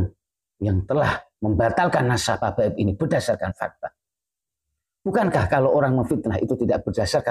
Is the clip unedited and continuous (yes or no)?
no